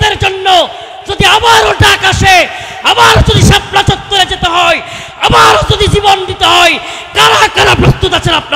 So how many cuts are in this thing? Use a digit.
0